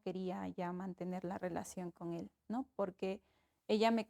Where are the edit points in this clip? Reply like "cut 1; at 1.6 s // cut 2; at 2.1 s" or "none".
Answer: none